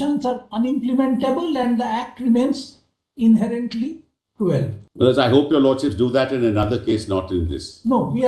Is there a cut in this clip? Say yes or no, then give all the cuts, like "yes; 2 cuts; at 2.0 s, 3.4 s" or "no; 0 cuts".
yes; 1 cut; at 4.8 s